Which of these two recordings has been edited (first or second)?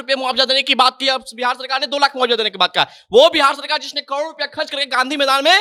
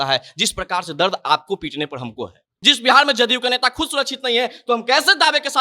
second